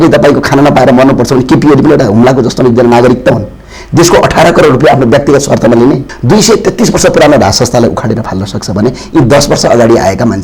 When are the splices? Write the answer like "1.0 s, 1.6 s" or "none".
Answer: 6.1 s